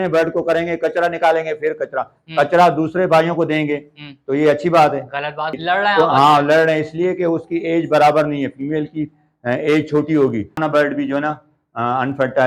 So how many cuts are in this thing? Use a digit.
2